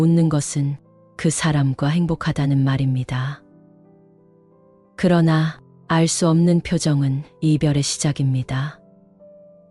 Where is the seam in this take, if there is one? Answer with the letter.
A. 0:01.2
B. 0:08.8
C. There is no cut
B